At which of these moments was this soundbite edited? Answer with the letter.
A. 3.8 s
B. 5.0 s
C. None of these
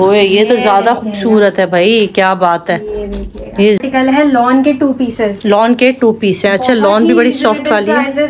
A